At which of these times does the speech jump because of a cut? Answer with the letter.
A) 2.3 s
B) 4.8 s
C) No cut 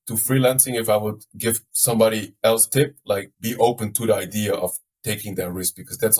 C